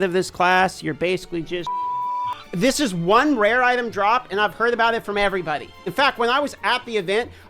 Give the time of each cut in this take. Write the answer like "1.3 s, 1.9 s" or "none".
2.4 s, 5.8 s